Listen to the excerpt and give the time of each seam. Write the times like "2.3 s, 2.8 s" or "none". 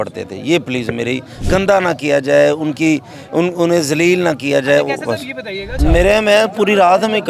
1.4 s, 5.6 s